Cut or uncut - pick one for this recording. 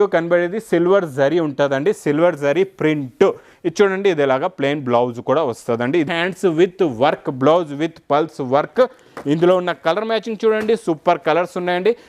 cut